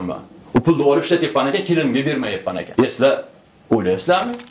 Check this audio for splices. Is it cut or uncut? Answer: cut